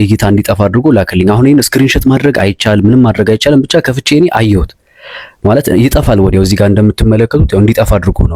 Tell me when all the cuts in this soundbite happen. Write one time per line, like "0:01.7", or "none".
none